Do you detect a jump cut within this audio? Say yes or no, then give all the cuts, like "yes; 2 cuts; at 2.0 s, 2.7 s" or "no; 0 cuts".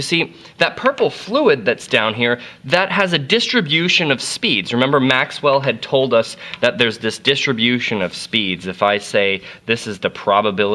no; 0 cuts